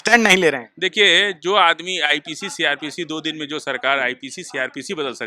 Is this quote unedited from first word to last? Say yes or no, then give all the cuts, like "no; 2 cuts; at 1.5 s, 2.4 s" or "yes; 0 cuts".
yes; 0 cuts